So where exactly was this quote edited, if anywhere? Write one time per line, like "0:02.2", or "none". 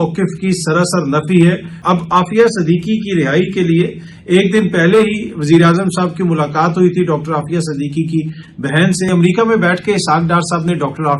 0:01.8
0:09.1